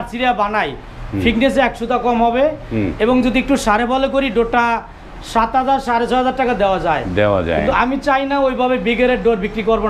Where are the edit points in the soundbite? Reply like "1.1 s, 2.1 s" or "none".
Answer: none